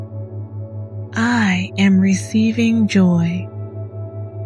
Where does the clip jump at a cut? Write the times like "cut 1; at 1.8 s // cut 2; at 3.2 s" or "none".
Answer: cut 1; at 1.1 s // cut 2; at 3.4 s